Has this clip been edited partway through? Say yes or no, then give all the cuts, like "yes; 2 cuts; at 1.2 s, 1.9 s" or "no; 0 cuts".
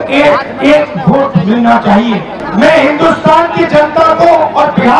yes; 1 cut; at 2.4 s